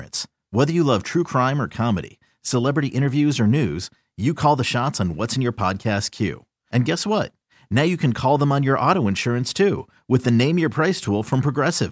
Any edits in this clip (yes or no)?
no